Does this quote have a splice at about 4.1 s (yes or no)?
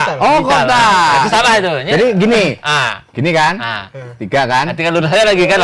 no